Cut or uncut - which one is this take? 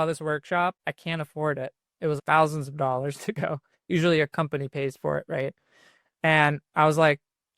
cut